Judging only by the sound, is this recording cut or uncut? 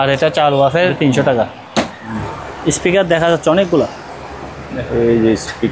cut